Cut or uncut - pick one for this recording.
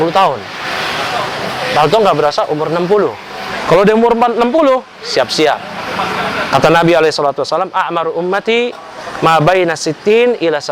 uncut